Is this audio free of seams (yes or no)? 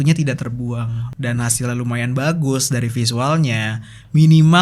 no